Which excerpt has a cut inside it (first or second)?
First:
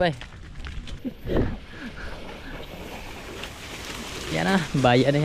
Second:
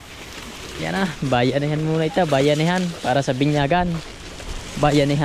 first